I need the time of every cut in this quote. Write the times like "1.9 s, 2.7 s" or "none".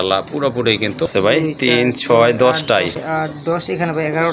1.4 s, 3.0 s